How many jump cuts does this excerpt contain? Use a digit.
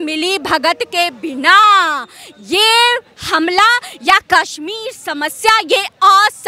0